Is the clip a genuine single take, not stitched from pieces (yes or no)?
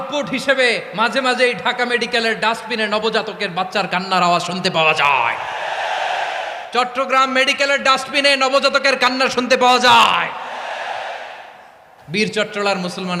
yes